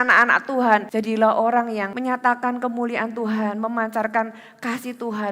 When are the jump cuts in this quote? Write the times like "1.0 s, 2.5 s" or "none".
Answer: 0.9 s, 1.9 s